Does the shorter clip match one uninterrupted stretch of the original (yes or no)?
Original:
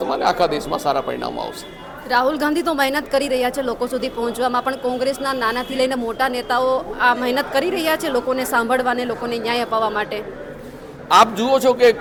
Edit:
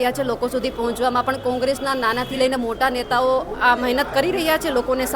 yes